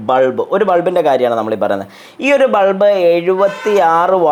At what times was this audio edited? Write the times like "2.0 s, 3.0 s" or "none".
none